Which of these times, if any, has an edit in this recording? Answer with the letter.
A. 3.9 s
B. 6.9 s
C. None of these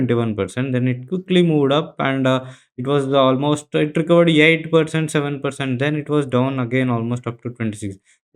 C